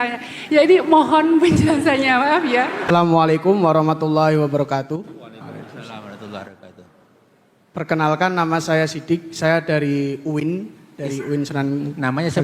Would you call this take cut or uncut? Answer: cut